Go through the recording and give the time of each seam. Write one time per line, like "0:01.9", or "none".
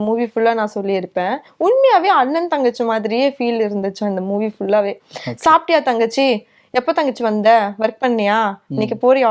none